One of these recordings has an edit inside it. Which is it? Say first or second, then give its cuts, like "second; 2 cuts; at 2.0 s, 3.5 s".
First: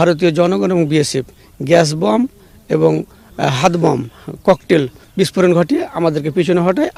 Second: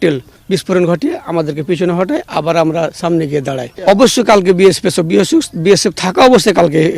second; 1 cut; at 3.7 s